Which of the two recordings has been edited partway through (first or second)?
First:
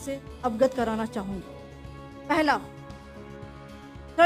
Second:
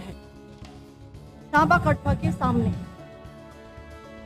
second